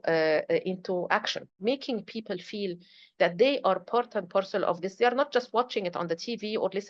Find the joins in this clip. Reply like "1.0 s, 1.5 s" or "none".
1.4 s